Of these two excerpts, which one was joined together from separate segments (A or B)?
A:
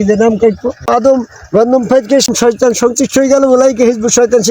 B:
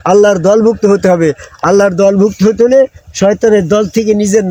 A